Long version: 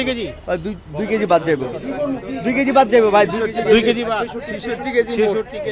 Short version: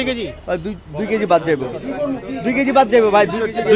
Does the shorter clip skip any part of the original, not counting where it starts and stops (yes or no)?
no